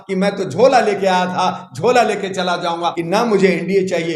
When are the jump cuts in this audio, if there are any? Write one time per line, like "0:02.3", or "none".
0:03.0